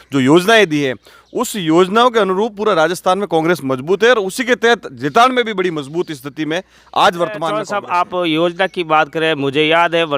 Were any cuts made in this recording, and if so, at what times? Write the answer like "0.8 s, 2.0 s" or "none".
7.7 s